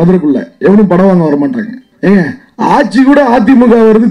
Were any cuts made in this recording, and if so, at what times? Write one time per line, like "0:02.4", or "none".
0:01.8